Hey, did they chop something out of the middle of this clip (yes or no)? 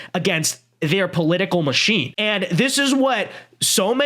yes